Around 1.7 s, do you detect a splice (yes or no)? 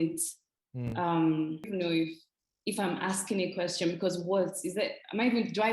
yes